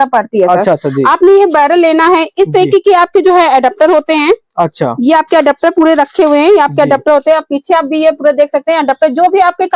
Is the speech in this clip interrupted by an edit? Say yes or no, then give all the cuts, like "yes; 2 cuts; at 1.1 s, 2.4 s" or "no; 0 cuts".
no; 0 cuts